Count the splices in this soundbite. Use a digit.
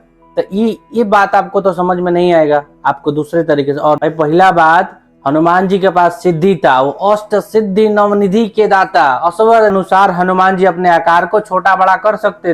2